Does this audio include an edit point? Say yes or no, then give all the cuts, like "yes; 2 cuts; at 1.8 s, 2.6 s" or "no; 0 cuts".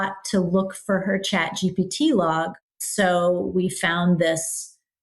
yes; 1 cut; at 2.8 s